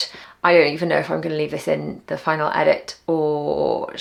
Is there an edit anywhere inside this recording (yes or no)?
no